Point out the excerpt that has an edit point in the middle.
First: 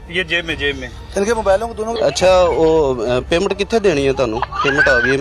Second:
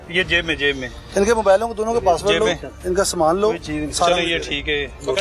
first; 1 cut; at 1.9 s

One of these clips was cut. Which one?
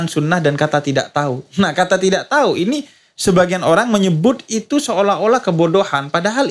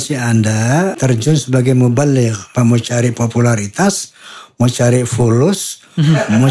second; 2 cuts; at 1.0 s, 2.4 s

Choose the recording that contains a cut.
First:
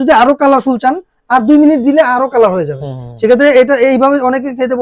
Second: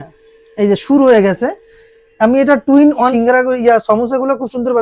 second; 1 cut; at 3.1 s

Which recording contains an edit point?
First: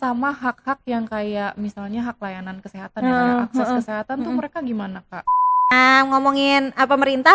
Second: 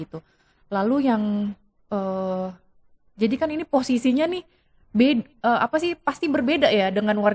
first; 1 cut; at 5.4 s

